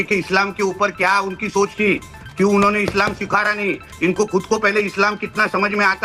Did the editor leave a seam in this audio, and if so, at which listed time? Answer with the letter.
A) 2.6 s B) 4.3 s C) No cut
C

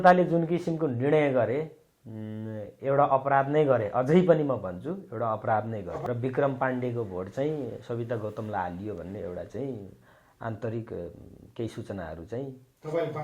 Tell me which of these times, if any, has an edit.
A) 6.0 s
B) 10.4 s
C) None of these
A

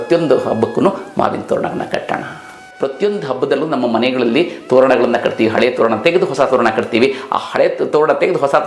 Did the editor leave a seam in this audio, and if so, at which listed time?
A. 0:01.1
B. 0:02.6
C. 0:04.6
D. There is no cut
B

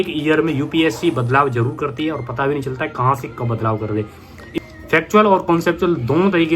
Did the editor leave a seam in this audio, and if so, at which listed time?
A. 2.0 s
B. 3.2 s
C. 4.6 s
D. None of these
C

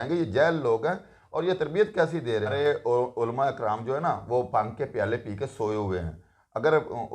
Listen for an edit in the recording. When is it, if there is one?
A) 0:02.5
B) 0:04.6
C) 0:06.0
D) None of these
A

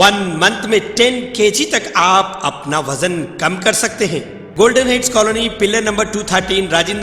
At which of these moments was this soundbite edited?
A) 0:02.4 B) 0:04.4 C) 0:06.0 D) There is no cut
B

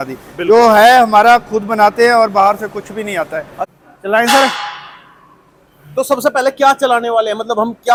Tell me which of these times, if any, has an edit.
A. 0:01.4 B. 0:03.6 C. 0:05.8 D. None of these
D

